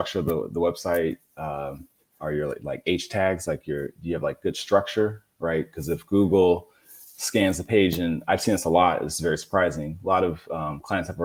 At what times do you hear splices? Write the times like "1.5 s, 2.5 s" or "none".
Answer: none